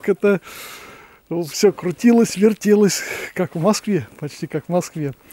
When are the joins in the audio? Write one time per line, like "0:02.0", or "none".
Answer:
none